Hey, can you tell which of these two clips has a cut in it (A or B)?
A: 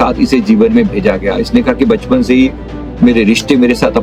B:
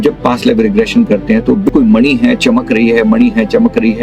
B